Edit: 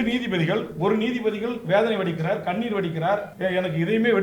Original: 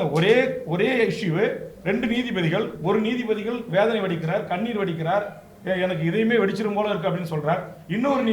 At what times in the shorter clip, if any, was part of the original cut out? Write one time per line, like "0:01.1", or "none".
0:03.3